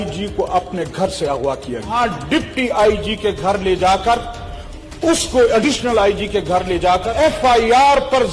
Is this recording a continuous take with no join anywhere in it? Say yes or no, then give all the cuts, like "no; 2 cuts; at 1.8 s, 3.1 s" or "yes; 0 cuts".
no; 2 cuts; at 1.9 s, 7.1 s